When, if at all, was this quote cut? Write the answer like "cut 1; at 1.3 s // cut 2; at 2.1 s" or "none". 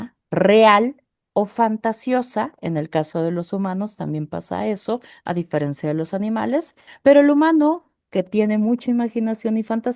cut 1; at 6.8 s